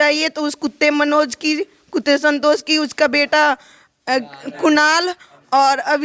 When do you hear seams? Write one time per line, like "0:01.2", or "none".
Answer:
none